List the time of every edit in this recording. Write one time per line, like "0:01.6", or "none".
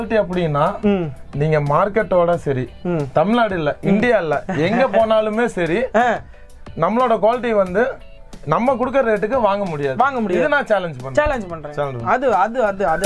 none